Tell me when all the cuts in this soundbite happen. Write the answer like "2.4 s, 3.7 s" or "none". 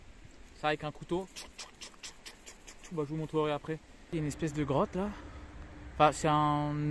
4.1 s